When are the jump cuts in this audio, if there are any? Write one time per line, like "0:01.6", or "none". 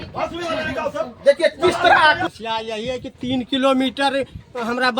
0:02.2